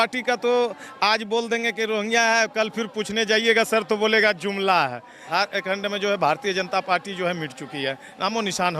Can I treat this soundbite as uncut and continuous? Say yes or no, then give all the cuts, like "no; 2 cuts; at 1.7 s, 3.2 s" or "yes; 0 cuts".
no; 1 cut; at 5.3 s